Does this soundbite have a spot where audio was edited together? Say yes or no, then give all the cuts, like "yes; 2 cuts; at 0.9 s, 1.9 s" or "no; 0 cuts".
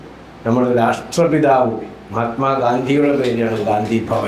no; 0 cuts